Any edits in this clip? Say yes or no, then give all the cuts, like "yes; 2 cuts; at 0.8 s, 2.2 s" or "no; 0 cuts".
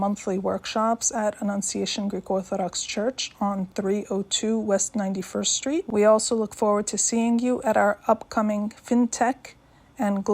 yes; 1 cut; at 5.9 s